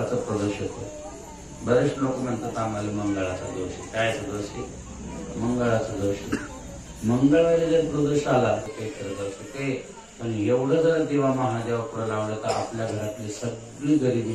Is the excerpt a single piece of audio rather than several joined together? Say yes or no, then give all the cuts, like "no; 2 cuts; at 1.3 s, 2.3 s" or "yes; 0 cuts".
no; 1 cut; at 8.7 s